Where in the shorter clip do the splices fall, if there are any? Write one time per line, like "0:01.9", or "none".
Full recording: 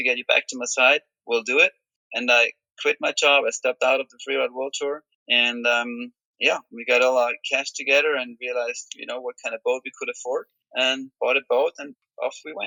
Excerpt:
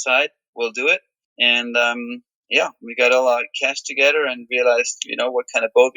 0:01.2